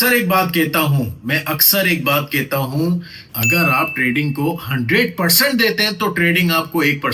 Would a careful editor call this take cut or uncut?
uncut